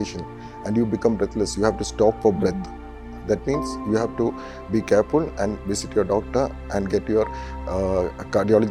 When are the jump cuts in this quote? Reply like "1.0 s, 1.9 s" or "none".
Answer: none